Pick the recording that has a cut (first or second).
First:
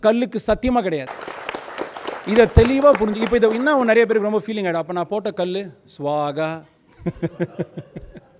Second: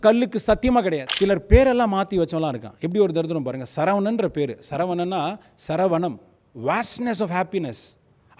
second